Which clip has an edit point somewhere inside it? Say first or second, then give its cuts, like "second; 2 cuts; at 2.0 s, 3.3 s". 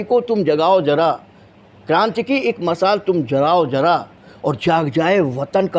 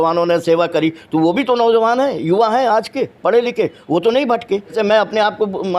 second; 1 cut; at 4.7 s